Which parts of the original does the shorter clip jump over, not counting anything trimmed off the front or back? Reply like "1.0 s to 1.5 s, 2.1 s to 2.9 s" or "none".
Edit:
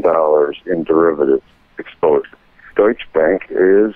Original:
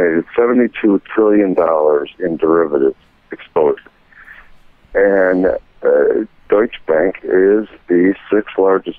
4.1 s to 6.3 s